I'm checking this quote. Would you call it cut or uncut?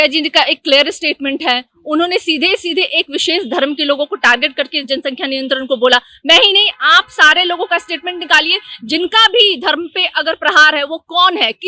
uncut